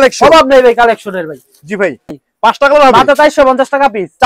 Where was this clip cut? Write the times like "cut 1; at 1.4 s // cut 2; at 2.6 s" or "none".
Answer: cut 1; at 2.2 s